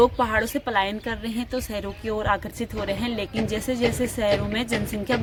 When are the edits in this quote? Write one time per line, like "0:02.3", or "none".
none